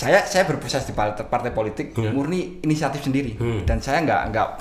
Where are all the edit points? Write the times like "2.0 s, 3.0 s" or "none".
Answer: none